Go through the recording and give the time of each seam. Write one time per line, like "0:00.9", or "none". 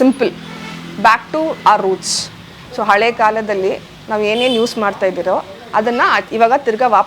none